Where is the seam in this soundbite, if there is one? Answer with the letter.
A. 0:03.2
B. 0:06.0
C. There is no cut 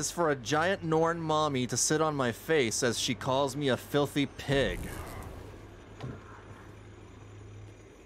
C